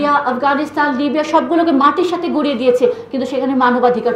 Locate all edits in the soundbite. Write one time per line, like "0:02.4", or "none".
none